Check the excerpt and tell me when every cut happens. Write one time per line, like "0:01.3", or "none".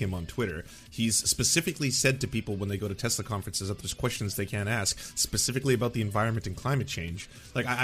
none